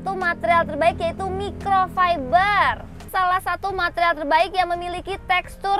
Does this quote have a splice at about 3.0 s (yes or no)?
yes